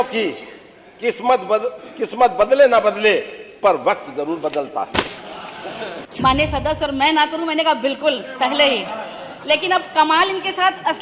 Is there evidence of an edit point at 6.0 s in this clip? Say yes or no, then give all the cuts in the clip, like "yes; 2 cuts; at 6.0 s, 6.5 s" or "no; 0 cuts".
yes; 1 cut; at 6.0 s